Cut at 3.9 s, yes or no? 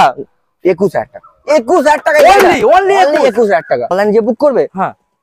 yes